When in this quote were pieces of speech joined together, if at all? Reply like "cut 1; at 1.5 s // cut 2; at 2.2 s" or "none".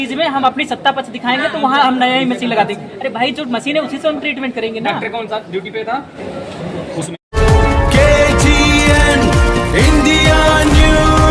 none